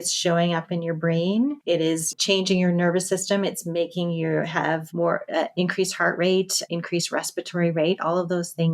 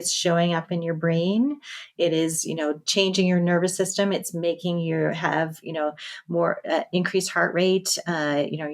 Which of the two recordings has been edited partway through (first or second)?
first